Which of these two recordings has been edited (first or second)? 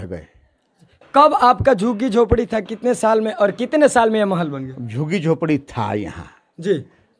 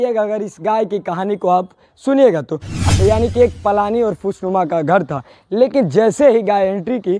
second